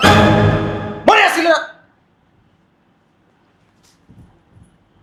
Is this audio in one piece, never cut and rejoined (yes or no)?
yes